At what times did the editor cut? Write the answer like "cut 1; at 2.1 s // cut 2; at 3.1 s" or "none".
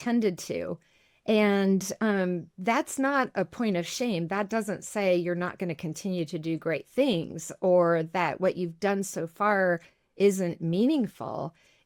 none